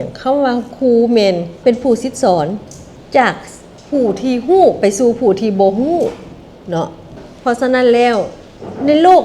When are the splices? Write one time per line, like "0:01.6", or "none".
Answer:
0:01.6